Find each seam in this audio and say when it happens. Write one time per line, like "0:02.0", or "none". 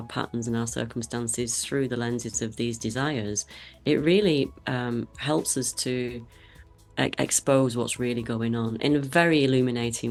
none